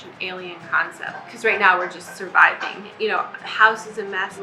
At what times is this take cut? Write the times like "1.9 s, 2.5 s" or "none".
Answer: 1.2 s, 2.8 s